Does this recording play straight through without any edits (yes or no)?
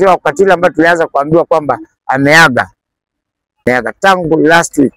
no